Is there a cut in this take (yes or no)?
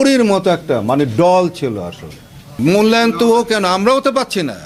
yes